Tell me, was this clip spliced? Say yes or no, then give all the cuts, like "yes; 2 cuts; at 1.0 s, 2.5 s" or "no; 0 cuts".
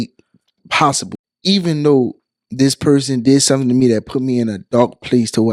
yes; 1 cut; at 1.1 s